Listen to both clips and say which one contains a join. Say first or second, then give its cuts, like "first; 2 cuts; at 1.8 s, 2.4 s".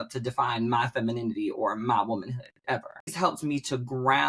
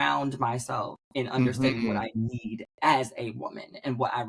first; 1 cut; at 3.1 s